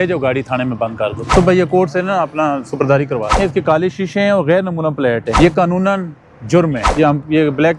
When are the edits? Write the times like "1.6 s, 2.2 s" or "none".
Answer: 1.2 s, 3.4 s, 5.3 s, 6.8 s

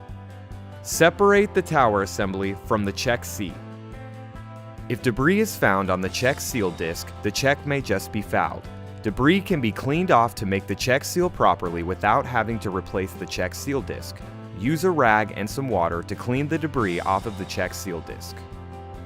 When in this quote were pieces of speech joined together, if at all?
none

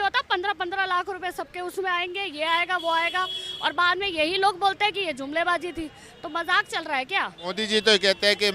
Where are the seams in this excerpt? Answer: 7.6 s

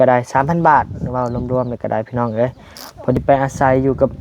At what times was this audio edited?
3.2 s

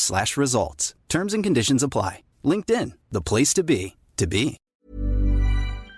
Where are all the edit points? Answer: 4.7 s

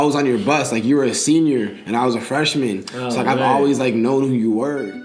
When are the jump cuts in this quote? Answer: none

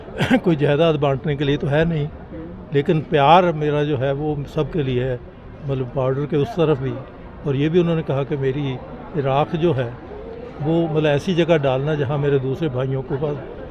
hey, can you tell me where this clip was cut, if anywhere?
none

